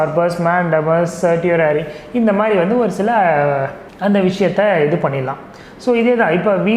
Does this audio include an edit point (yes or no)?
yes